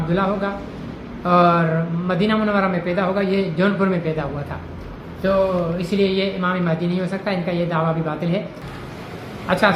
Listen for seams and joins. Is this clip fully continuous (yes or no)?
no